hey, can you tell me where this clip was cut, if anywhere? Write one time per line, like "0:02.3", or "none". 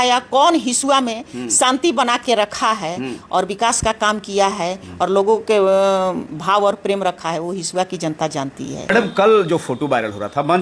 0:08.9